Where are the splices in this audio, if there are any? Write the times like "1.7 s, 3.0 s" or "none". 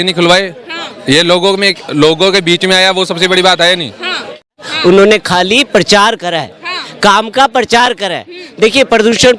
4.4 s